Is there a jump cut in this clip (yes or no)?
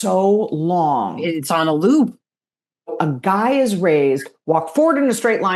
yes